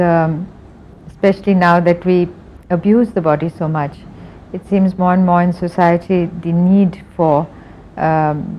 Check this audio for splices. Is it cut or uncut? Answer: uncut